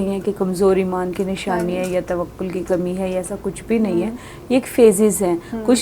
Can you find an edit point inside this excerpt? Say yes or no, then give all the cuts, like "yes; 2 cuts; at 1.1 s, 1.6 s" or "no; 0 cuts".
no; 0 cuts